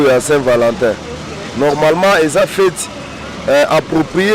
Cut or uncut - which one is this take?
uncut